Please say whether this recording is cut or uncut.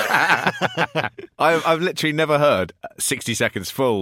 cut